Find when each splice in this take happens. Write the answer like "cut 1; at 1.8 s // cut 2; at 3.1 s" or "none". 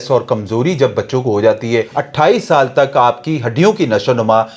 cut 1; at 1.9 s